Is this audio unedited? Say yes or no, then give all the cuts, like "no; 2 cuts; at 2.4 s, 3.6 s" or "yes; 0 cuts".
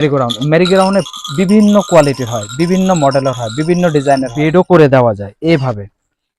no; 1 cut; at 4.4 s